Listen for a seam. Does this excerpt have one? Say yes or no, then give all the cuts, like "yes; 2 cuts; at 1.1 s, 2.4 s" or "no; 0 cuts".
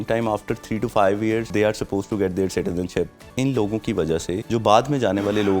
yes; 3 cuts; at 1.5 s, 3.2 s, 4.4 s